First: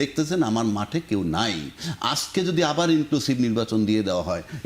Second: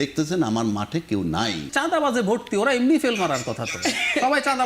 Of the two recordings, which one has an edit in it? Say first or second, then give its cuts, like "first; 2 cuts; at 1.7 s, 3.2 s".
second; 1 cut; at 1.7 s